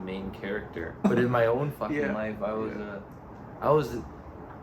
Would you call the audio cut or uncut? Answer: cut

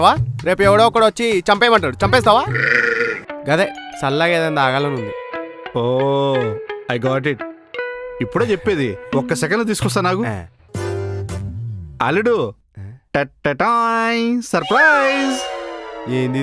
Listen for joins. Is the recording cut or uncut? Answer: cut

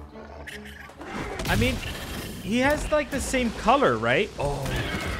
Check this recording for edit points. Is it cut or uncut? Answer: uncut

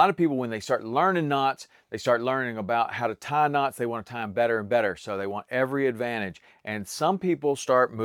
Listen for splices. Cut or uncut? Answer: uncut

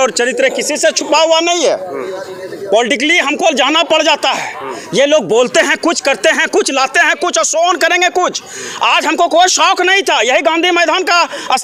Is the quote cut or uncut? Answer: uncut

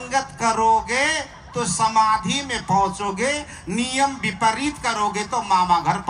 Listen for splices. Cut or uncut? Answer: uncut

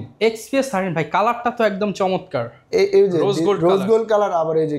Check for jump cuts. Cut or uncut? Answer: uncut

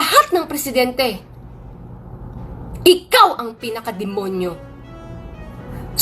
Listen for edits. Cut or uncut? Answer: uncut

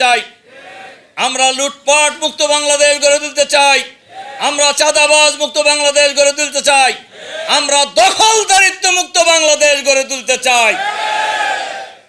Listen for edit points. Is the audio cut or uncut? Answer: uncut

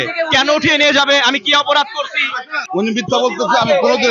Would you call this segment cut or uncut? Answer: cut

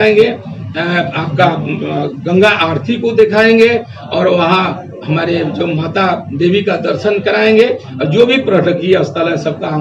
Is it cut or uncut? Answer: uncut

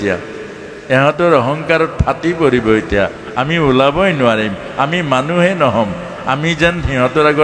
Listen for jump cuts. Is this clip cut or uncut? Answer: uncut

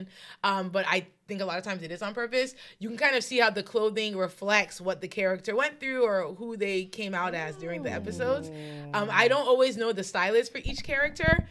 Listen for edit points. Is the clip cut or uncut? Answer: uncut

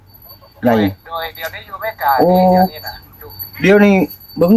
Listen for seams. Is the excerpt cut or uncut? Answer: uncut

